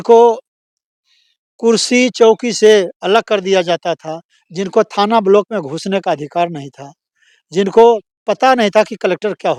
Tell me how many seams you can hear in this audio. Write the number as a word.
zero